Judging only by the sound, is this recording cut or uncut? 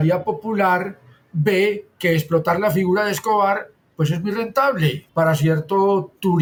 uncut